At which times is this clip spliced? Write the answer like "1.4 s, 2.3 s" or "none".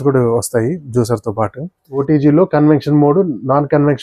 1.8 s